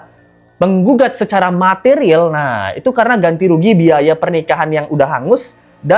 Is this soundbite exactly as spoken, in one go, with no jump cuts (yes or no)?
yes